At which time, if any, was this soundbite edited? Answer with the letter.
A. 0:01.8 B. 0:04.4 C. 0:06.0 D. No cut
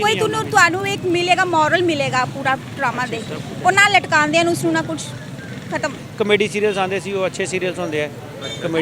C